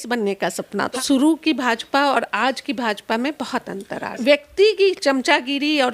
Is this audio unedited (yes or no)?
no